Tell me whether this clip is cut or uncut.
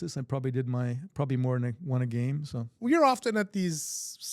cut